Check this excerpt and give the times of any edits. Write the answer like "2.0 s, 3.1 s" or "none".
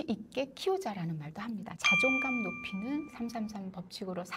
1.7 s